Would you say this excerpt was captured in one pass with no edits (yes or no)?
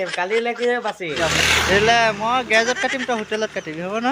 no